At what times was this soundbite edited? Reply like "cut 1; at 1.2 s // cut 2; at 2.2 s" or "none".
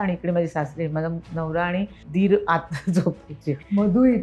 cut 1; at 2.0 s